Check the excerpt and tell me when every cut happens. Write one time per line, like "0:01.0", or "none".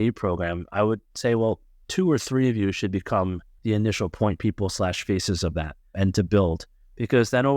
0:01.7
0:03.5
0:05.8